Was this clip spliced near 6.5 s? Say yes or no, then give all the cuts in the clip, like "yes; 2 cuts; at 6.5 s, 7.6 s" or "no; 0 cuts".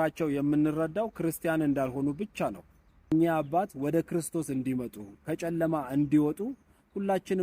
no; 1 cut; at 3.1 s